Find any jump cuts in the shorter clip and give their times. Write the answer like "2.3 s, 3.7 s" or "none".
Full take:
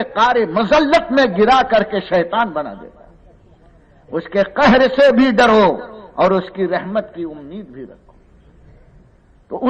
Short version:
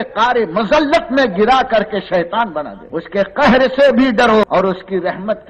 2.8 s, 4.4 s